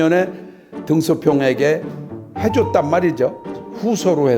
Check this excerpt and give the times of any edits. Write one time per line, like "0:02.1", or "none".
none